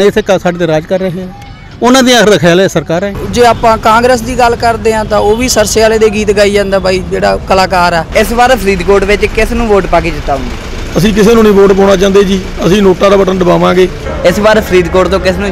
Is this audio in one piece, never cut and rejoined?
no; 3 cuts; at 3.2 s, 8.1 s, 14.0 s

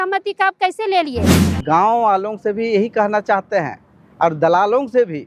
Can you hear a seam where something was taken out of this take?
yes; 1 cut; at 1.3 s

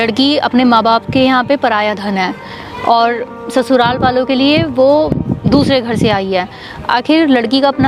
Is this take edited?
no; 0 cuts

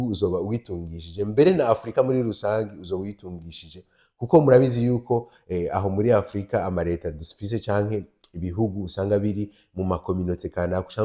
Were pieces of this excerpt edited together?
no; 0 cuts

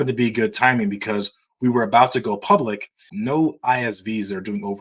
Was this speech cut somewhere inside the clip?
yes; 1 cut; at 3.0 s

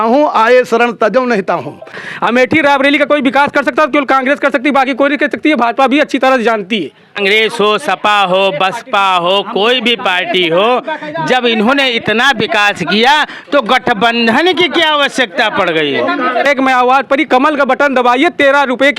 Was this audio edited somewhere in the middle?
yes; 3 cuts; at 2.0 s, 7.0 s, 16.5 s

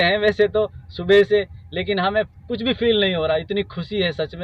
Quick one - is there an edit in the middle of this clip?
no; 0 cuts

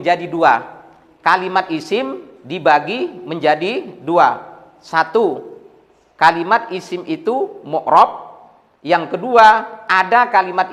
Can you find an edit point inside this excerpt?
no; 0 cuts

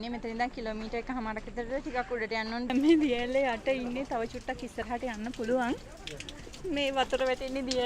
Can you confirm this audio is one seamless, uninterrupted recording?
no; 1 cut; at 2.7 s

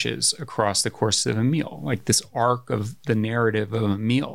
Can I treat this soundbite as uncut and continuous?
yes; 0 cuts

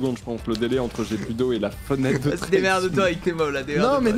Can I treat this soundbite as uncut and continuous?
yes; 0 cuts

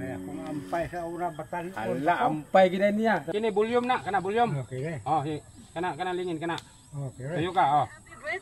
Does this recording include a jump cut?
yes; 1 cut; at 3.3 s

